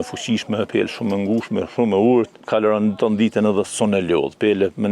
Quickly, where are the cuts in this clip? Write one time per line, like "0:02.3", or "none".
0:02.4